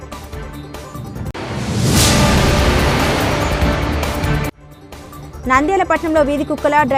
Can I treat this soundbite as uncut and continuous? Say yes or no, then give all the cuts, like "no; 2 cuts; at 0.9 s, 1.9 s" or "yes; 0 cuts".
yes; 0 cuts